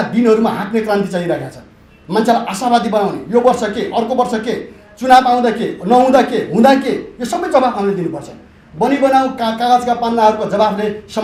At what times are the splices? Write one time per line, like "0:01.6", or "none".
none

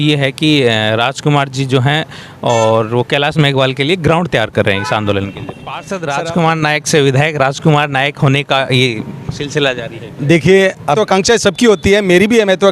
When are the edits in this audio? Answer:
0:05.9
0:11.0

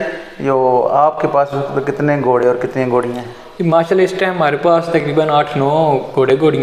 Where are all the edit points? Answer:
none

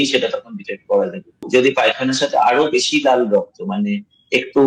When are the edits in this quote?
0:01.4

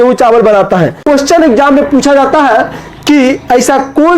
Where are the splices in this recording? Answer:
0:01.0

